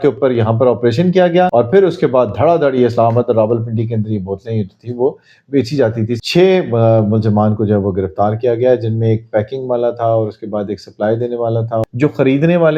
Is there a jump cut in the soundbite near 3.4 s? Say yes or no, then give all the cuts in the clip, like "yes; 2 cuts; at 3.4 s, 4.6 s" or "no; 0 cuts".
no; 3 cuts; at 1.5 s, 6.1 s, 11.8 s